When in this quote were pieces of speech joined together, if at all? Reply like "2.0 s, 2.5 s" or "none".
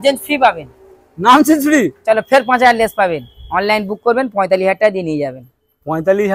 none